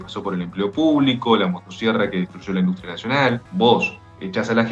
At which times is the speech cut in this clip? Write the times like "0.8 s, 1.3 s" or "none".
3.4 s